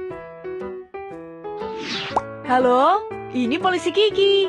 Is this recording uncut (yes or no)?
no